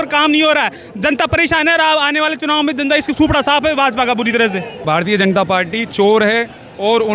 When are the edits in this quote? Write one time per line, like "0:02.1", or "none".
0:04.8